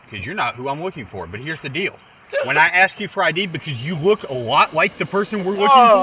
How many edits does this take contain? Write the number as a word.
zero